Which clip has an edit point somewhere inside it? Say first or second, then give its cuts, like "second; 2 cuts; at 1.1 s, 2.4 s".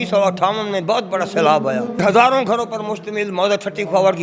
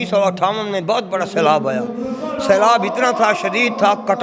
first; 1 cut; at 2.0 s